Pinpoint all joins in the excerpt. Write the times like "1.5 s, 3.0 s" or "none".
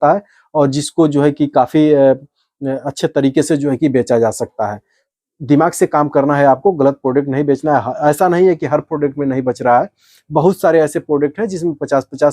5.1 s